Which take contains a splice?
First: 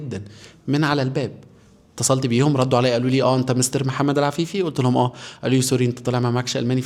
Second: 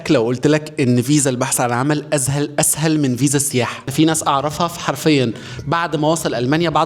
second; 1 cut; at 3.9 s

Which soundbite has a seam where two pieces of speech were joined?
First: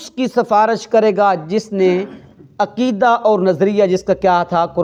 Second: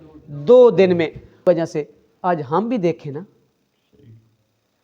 second; 1 cut; at 1.4 s

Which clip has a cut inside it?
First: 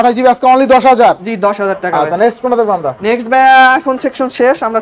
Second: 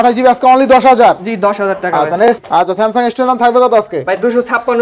second; 1 cut; at 2.4 s

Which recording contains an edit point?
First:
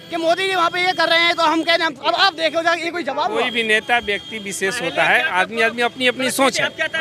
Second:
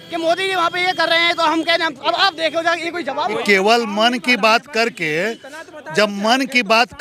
second; 1 cut; at 3.4 s

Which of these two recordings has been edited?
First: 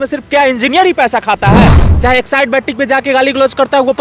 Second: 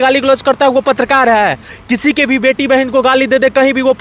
first; 1 cut; at 1.8 s

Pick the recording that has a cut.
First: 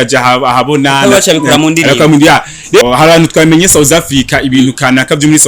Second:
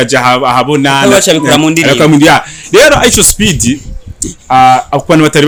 first; 1 cut; at 2.8 s

